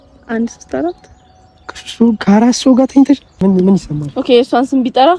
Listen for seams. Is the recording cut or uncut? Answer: cut